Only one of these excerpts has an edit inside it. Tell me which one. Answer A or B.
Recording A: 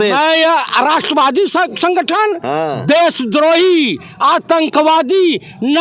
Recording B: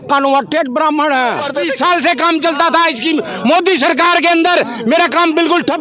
B